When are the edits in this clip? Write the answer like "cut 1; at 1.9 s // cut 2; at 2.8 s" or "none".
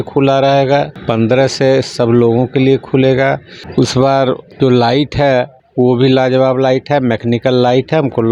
cut 1; at 1.0 s // cut 2; at 3.5 s // cut 3; at 4.5 s // cut 4; at 5.6 s